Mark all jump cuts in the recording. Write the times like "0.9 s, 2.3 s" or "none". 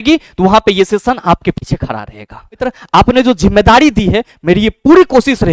2.6 s